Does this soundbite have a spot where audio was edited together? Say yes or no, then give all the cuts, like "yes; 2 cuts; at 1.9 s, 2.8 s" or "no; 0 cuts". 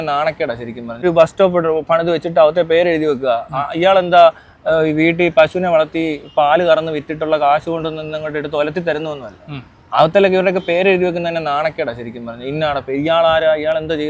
yes; 1 cut; at 1.0 s